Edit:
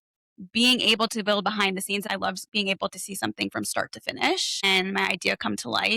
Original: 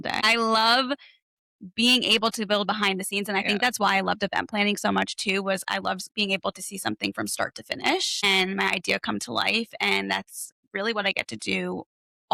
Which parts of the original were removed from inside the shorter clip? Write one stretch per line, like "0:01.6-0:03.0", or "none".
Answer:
0:03.3-0:05.7